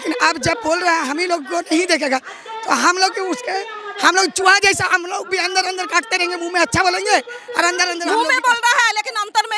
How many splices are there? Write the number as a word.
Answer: one